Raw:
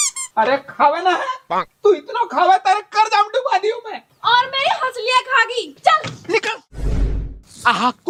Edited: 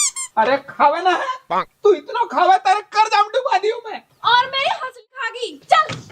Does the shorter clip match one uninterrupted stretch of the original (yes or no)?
no